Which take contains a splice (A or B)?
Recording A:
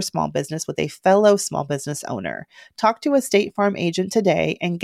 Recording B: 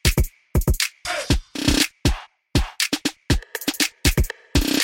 B